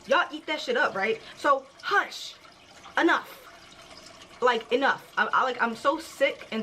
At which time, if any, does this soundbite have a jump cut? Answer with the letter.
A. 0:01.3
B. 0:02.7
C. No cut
A